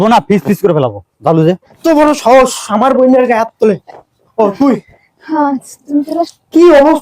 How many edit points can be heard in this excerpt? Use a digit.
1